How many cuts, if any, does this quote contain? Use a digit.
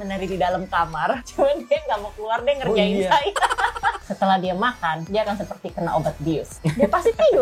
4